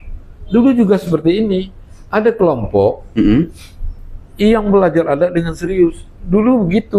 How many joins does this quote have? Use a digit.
0